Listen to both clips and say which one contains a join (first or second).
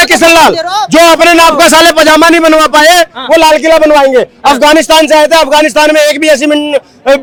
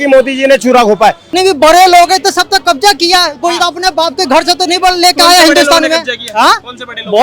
second